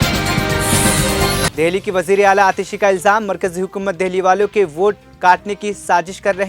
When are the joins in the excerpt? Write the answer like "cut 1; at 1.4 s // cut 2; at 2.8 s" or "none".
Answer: cut 1; at 1.5 s